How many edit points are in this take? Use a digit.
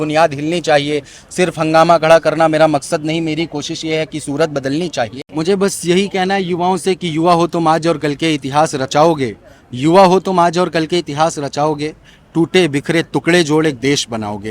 1